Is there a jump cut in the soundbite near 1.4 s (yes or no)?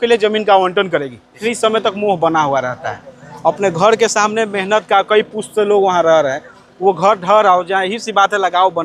yes